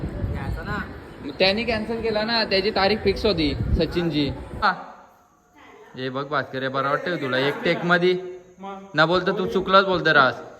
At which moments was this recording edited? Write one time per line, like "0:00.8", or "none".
0:04.6